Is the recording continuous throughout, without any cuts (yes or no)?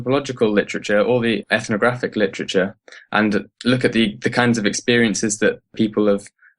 no